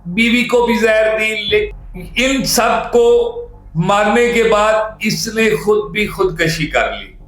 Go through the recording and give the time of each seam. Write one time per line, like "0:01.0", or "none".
0:01.7

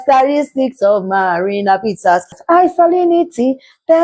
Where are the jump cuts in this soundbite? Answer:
0:02.4

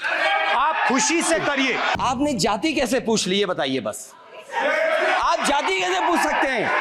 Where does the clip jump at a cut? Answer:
0:01.9

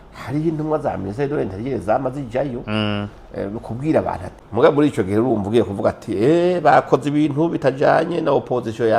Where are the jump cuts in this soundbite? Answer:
0:04.4

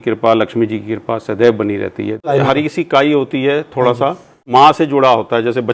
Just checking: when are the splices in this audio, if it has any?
0:02.2
0:04.3

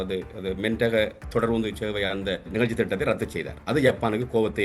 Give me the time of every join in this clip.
0:02.5

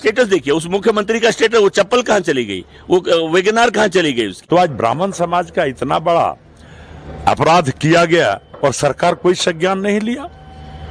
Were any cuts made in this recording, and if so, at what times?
0:04.4

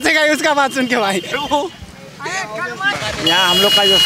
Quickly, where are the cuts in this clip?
0:02.9

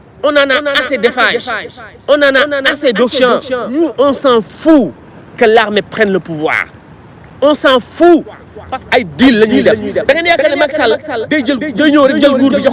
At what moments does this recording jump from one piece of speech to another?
0:03.7
0:08.3

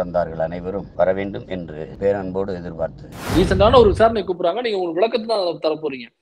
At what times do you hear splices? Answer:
0:00.9
0:01.9
0:03.2

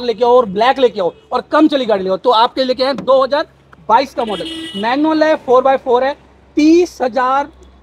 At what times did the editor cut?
none

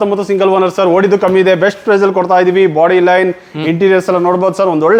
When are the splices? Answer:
none

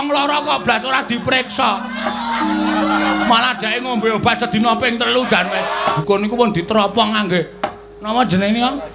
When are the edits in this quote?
0:03.2
0:06.0

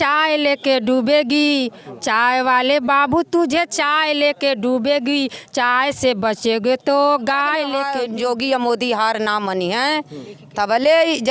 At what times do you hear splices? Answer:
0:07.8

